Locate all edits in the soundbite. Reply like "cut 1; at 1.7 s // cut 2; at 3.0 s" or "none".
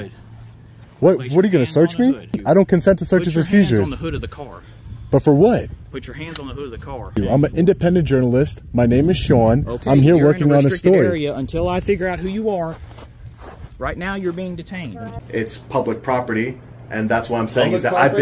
cut 1; at 2.4 s // cut 2; at 7.2 s // cut 3; at 15.2 s